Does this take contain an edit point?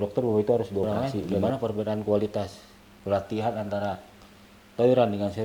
yes; 1 cut; at 1.3 s

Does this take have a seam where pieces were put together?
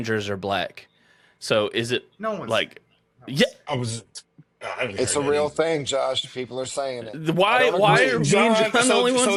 no; 0 cuts

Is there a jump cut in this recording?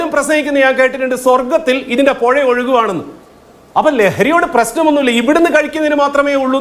no; 0 cuts

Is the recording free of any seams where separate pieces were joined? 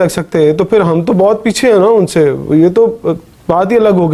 yes; 0 cuts

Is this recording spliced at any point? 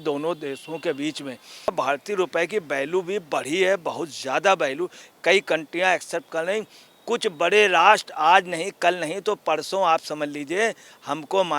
yes; 1 cut; at 1.7 s

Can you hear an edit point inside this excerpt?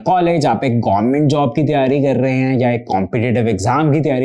no; 0 cuts

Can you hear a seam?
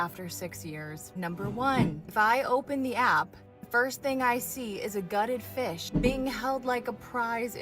yes; 1 cut; at 1.4 s

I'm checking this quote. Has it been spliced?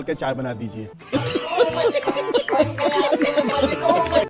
no; 0 cuts

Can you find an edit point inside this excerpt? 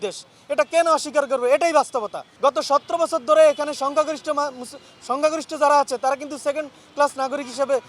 yes; 1 cut; at 2.2 s

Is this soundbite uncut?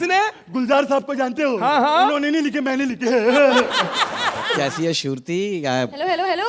no; 1 cut; at 4.5 s

